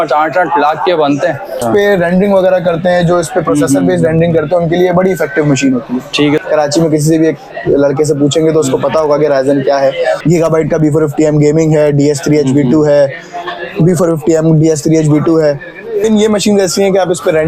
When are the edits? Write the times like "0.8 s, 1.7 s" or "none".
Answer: 1.6 s, 6.4 s, 10.2 s, 16.0 s